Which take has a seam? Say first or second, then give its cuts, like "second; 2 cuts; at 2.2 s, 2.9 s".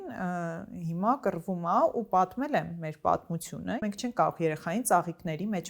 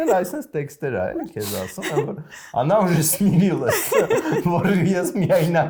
first; 1 cut; at 3.8 s